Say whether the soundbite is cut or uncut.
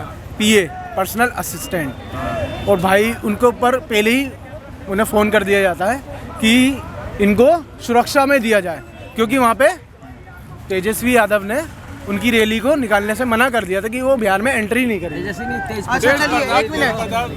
uncut